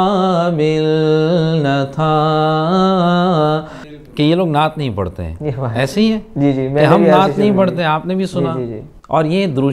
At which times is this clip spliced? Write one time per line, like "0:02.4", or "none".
0:04.0